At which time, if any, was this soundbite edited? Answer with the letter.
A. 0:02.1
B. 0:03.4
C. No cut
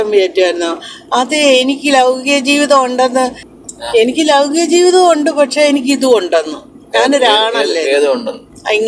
B